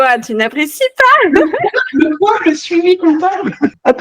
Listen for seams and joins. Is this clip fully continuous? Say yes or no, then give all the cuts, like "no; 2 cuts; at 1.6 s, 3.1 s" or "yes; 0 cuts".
yes; 0 cuts